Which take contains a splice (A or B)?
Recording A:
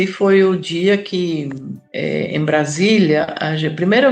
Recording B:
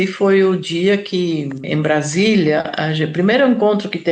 B